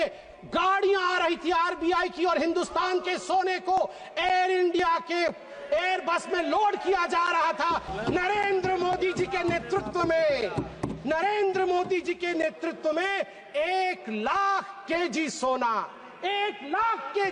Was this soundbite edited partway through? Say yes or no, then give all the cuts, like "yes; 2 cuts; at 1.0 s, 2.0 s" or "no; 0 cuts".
yes; 1 cut; at 7.9 s